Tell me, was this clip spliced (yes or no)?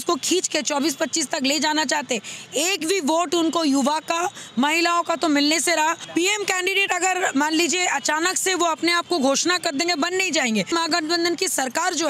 yes